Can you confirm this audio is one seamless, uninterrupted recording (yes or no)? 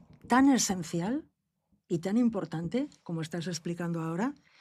yes